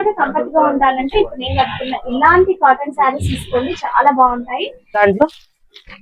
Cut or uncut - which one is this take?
cut